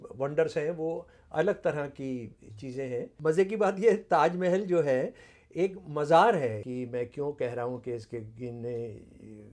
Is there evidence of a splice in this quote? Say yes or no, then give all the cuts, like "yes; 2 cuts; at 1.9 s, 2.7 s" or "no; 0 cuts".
yes; 2 cuts; at 3.1 s, 6.6 s